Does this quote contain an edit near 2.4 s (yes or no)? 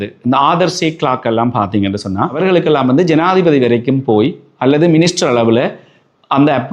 yes